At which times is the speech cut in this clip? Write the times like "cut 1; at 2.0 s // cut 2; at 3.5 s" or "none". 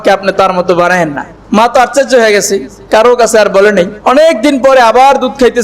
cut 1; at 1.3 s // cut 2; at 3.9 s